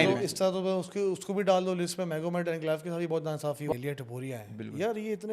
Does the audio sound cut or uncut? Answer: cut